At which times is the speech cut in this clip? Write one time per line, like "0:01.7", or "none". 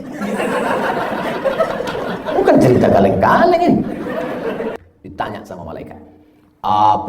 0:04.8